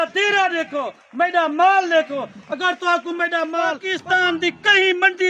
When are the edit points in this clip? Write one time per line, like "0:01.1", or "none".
0:03.9